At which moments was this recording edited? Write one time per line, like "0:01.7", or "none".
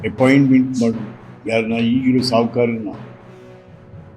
0:03.1